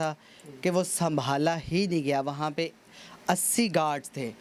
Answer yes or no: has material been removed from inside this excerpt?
no